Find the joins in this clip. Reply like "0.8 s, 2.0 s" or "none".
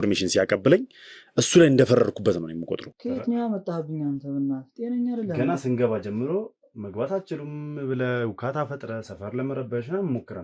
2.9 s